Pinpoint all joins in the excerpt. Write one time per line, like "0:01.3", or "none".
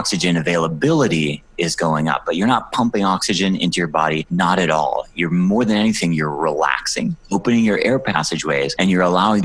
none